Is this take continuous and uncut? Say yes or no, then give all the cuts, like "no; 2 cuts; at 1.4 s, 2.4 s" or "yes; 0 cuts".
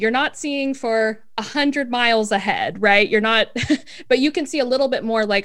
yes; 0 cuts